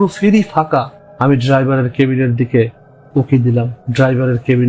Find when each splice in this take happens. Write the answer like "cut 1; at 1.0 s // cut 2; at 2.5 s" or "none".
cut 1; at 1.0 s // cut 2; at 3.8 s